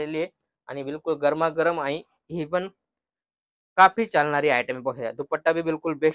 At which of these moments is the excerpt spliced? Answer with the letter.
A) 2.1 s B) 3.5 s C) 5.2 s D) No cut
D